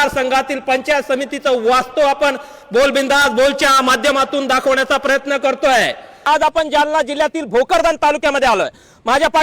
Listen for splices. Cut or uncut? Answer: cut